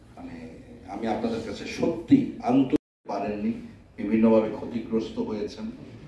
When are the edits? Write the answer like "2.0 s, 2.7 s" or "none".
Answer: 2.9 s